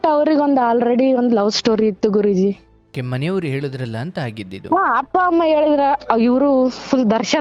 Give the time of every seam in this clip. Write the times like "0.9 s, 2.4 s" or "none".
2.9 s